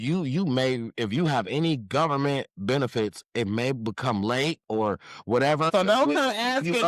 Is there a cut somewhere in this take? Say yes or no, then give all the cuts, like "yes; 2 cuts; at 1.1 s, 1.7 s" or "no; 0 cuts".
yes; 1 cut; at 5.7 s